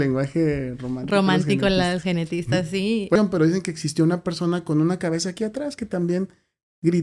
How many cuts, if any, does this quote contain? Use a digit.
1